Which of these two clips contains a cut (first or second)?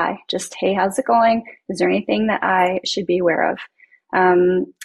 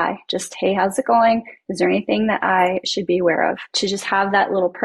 second